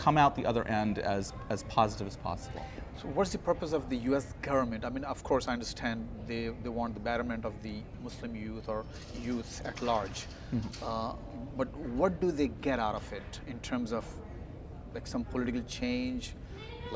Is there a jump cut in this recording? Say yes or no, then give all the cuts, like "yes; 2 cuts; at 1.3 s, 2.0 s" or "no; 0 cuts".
no; 0 cuts